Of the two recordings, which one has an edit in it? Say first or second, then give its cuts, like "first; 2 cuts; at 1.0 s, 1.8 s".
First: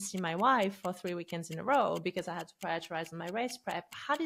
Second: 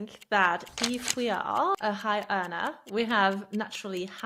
second; 1 cut; at 1.8 s